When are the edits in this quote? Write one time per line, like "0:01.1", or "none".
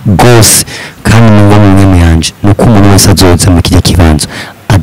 none